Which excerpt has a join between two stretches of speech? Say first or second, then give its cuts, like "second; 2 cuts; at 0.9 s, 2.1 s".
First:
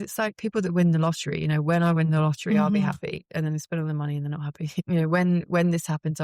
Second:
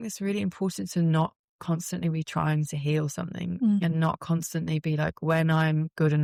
first; 1 cut; at 4.9 s